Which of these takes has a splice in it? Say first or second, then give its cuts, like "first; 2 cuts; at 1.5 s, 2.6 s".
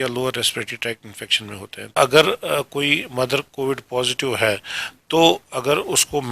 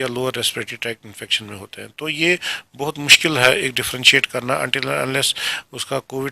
first; 1 cut; at 2.0 s